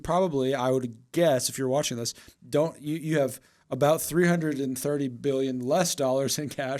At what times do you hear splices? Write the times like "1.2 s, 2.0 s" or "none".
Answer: none